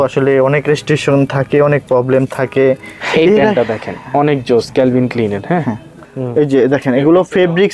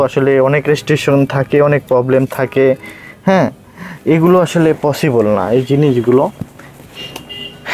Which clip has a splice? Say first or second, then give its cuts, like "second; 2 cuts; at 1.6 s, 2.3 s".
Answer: first; 2 cuts; at 2.9 s, 5.9 s